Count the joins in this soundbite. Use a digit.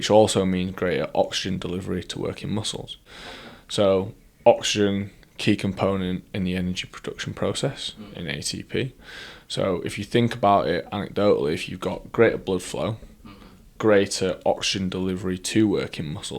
0